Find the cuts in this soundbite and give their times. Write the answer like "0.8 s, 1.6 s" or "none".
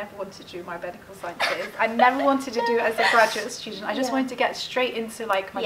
none